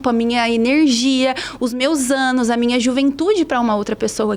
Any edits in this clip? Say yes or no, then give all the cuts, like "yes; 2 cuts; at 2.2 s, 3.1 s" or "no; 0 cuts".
no; 0 cuts